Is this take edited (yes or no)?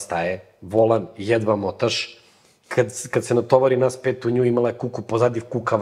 no